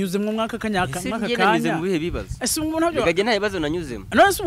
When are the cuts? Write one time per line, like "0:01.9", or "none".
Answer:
none